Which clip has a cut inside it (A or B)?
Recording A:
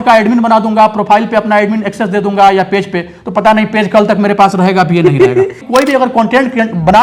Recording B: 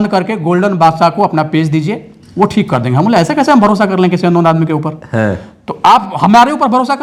A